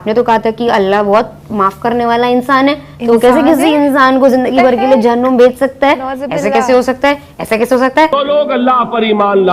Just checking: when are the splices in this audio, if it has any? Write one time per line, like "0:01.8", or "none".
0:08.1